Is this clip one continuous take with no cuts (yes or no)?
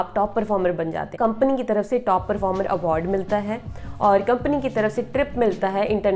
no